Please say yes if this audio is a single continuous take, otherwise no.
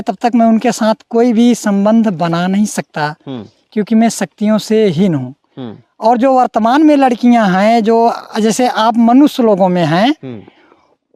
yes